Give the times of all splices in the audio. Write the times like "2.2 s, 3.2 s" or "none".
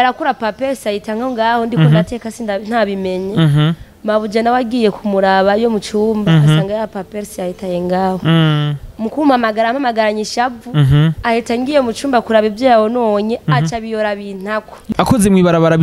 14.8 s